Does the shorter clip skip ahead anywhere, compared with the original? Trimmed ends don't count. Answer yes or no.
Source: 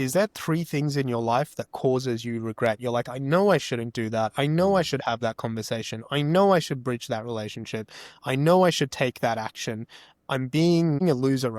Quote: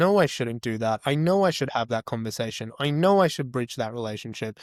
no